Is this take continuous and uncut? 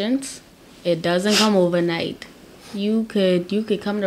yes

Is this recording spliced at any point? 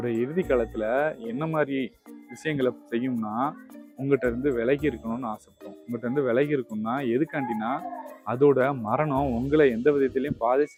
no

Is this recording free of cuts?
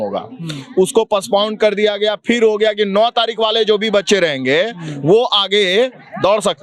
yes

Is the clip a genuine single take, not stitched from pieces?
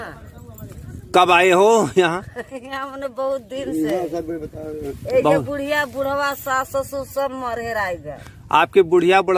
yes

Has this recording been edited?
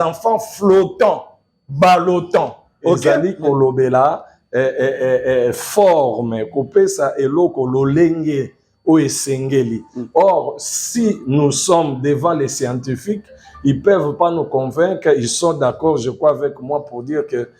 yes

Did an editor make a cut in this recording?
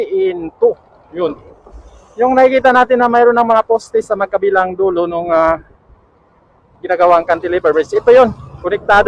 no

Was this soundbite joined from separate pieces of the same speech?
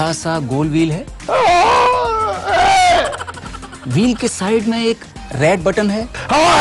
no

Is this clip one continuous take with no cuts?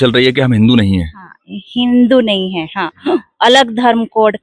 yes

